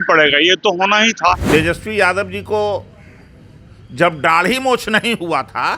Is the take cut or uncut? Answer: cut